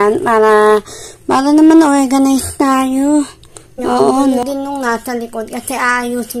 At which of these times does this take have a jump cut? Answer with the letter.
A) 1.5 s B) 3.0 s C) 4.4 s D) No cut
C